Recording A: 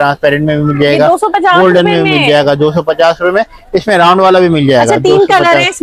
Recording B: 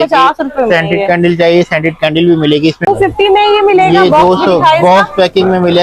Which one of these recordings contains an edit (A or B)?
B